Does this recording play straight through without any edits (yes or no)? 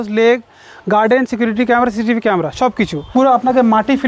no